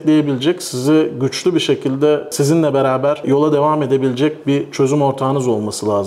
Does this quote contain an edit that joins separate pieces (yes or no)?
yes